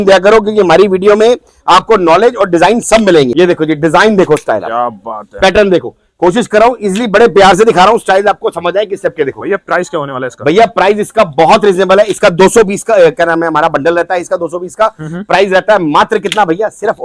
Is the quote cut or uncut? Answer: cut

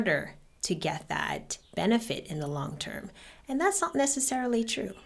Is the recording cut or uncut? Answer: uncut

